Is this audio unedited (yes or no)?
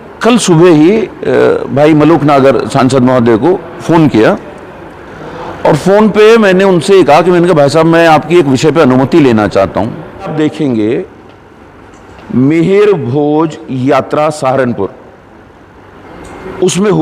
no